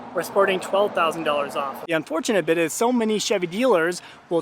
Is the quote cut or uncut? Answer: cut